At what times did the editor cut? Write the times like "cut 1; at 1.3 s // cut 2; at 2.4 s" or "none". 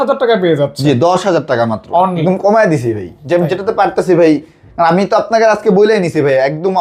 cut 1; at 2.2 s

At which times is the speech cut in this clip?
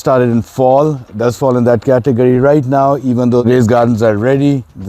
cut 1; at 1.1 s // cut 2; at 3.4 s

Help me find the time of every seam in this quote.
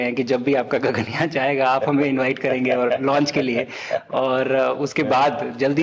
none

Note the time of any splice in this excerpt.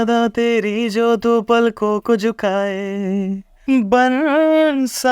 cut 1; at 3.5 s

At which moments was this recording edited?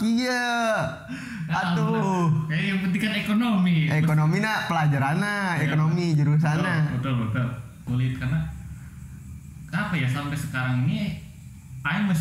cut 1; at 7.8 s

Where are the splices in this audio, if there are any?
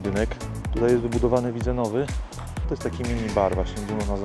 cut 1; at 2.7 s

